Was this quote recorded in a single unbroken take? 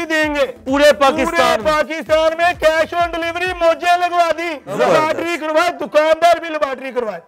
no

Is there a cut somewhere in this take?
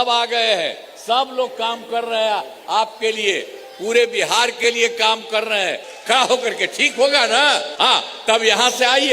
yes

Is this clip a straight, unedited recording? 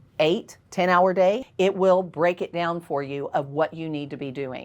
no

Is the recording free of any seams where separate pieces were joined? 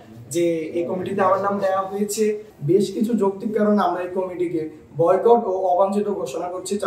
no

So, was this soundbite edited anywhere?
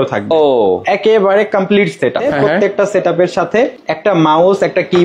yes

